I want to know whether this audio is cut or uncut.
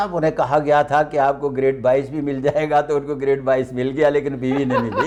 uncut